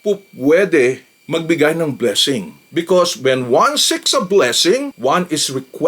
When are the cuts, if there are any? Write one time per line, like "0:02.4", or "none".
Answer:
0:02.6